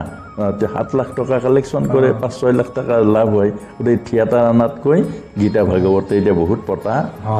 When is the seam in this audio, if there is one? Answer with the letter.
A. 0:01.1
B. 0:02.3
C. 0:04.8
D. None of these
D